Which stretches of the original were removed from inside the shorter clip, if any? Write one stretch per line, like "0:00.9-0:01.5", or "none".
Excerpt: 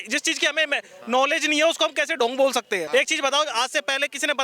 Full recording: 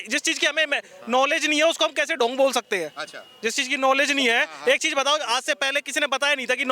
0:02.8-0:04.6